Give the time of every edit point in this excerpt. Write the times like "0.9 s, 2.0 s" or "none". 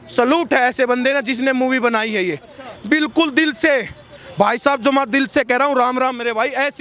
none